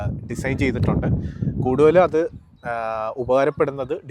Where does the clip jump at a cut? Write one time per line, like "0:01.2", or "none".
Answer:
none